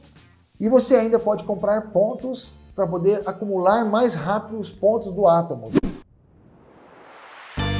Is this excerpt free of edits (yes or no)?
no